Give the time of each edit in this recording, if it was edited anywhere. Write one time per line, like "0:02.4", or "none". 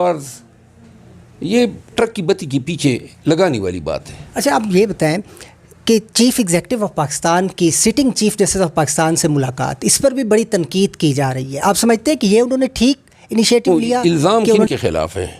0:04.2
0:13.7